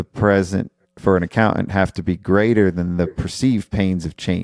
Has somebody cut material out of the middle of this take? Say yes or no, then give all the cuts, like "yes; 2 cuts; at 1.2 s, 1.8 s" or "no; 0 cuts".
no; 0 cuts